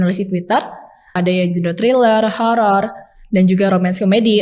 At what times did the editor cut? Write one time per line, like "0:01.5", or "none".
0:01.1